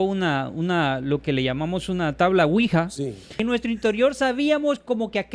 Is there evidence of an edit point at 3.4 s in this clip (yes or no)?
yes